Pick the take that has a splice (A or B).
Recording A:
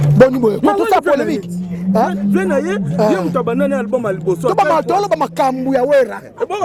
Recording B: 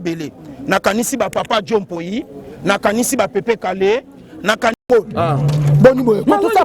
B